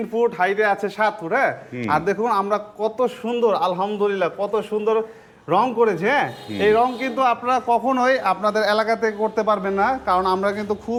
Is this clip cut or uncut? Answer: uncut